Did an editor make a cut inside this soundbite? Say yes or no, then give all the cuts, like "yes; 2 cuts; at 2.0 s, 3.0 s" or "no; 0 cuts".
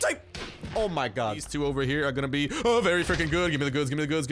yes; 1 cut; at 1.5 s